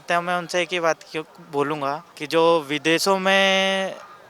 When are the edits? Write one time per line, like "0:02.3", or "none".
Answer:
0:02.1